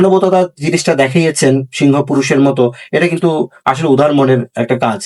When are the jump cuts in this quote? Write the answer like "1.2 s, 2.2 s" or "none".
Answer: none